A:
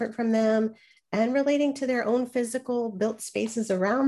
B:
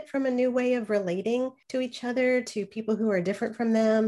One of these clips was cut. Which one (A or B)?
B